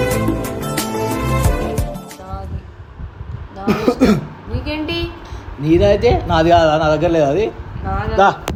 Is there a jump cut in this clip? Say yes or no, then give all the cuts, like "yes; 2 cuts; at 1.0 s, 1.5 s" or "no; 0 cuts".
no; 0 cuts